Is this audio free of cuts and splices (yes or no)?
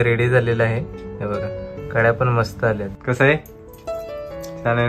no